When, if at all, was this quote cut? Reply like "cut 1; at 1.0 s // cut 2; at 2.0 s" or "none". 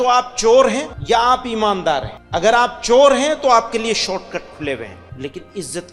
cut 1; at 0.9 s // cut 2; at 2.2 s // cut 3; at 5.0 s